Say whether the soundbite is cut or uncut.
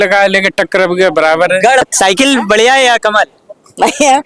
cut